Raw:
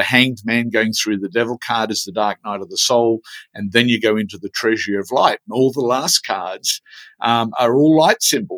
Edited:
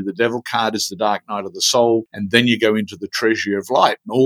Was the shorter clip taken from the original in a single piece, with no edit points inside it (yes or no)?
no